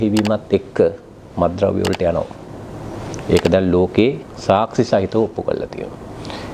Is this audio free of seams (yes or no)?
yes